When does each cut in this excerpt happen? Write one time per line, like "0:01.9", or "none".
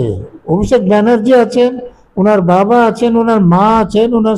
none